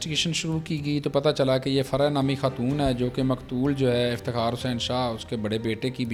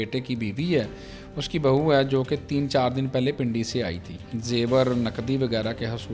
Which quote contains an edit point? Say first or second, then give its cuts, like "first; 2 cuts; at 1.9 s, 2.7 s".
second; 1 cut; at 4.3 s